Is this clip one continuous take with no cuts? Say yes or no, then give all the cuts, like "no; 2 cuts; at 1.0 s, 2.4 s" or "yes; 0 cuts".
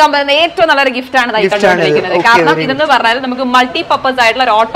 yes; 0 cuts